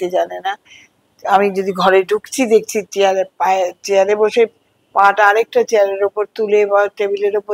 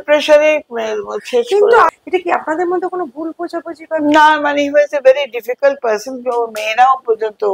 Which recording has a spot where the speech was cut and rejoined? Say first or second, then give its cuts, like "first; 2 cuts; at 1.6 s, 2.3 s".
second; 1 cut; at 1.9 s